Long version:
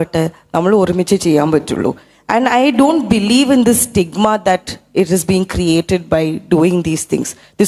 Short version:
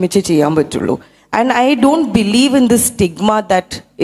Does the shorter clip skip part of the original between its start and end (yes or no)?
no